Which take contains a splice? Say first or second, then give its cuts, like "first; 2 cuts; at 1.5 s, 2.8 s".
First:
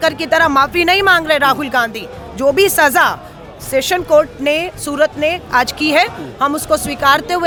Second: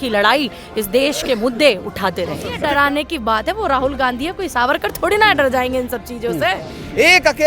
second; 1 cut; at 2.4 s